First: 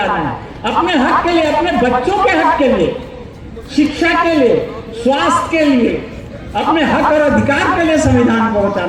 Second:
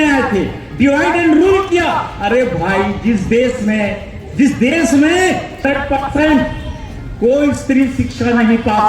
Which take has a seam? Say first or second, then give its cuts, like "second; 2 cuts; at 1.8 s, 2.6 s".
second; 1 cut; at 5.6 s